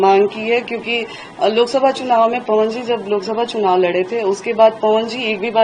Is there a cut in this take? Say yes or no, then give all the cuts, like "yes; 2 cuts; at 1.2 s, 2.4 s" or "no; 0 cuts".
no; 0 cuts